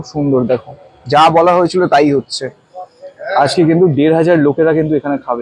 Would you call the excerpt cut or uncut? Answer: uncut